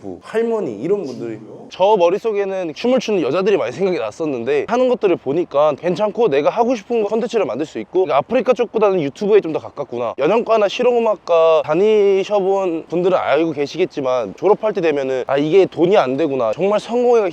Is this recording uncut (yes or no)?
no